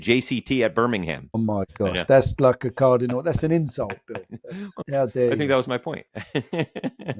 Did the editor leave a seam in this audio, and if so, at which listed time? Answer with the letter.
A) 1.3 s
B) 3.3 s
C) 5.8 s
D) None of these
A